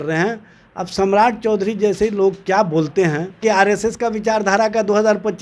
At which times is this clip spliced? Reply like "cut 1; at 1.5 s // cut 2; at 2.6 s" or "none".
cut 1; at 3.4 s